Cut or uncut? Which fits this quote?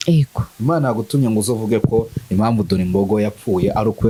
uncut